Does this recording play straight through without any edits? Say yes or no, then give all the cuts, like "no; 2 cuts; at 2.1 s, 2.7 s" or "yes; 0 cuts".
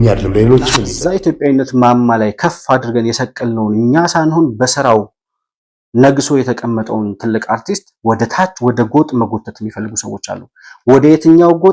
no; 1 cut; at 0.9 s